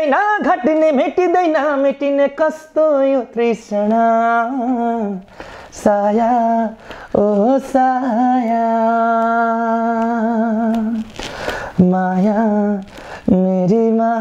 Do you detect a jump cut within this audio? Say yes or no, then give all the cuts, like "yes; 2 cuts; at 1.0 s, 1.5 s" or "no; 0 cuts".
no; 0 cuts